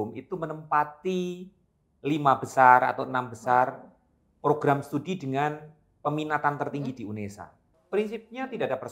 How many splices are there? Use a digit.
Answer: 1